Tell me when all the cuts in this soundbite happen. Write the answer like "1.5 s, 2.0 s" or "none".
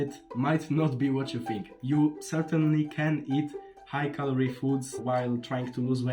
1.7 s, 5.0 s